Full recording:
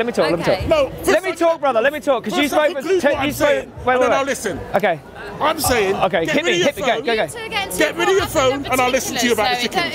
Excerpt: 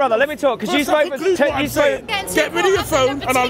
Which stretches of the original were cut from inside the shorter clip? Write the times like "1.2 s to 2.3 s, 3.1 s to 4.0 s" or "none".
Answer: 3.7 s to 7.5 s

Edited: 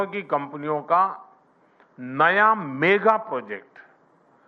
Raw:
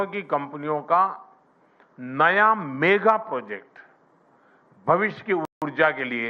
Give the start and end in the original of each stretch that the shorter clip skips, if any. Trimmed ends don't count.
none

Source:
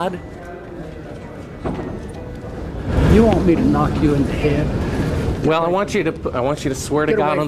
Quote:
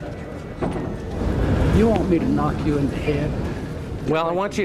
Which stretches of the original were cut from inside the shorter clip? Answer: 2.2 s to 2.5 s

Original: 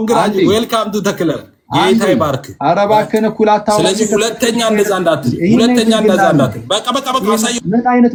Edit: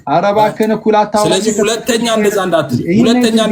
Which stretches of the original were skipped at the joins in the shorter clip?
none

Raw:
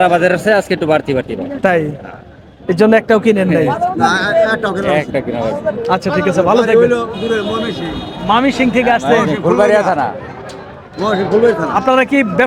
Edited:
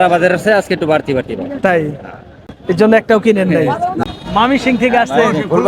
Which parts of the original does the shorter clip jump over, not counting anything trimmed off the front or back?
4.0 s to 7.9 s

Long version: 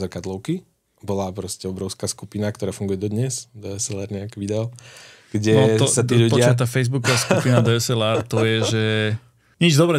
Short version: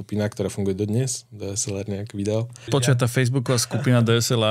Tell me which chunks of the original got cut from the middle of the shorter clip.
5.1 s to 6.4 s

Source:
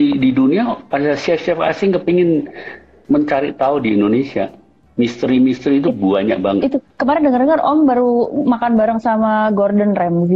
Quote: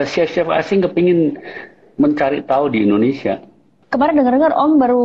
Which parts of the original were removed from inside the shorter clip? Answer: 4.9 s to 6.8 s

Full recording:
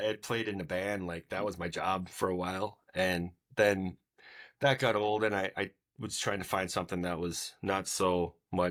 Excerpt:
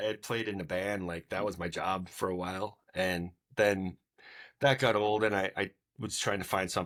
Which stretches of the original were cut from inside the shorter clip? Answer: none

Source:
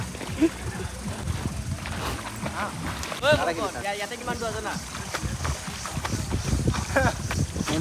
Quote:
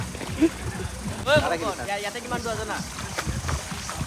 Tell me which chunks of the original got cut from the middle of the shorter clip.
1.2 s to 3.1 s

